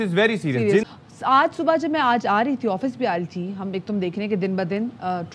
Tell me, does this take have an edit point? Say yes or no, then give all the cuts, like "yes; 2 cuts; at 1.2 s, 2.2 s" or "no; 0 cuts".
no; 0 cuts